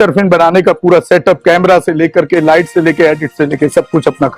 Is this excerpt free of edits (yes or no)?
yes